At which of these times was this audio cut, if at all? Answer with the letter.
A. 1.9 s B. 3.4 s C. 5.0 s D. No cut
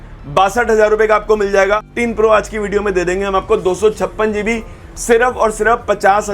A